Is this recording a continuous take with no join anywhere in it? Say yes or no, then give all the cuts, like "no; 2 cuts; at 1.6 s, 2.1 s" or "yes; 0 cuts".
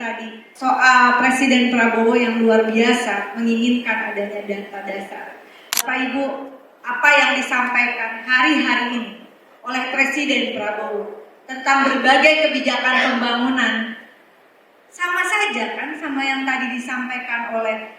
no; 1 cut; at 5.8 s